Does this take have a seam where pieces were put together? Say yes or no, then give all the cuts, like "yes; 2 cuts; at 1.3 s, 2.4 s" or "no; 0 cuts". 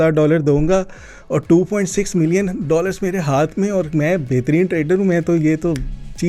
no; 0 cuts